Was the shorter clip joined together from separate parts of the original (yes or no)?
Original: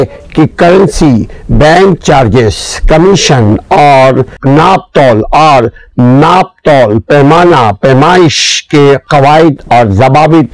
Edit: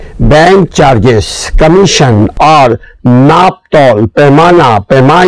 yes